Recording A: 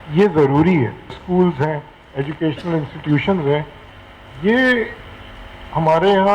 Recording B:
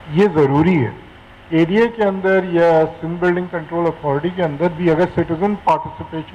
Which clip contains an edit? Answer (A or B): A